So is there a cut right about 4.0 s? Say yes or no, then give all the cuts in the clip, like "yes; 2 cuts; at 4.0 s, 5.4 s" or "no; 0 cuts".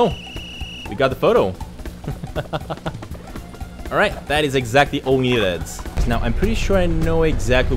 no; 1 cut; at 6.0 s